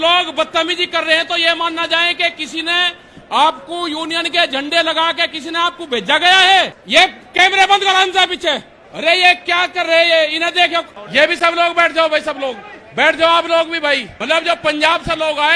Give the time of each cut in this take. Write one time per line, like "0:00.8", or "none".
0:14.1